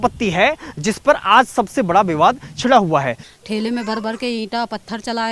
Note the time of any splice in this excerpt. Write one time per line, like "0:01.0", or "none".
0:03.2